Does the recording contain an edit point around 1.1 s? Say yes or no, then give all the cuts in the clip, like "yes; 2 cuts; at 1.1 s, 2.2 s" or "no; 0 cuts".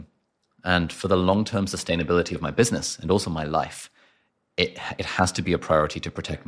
no; 0 cuts